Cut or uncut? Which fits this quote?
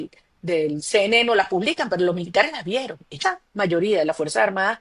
cut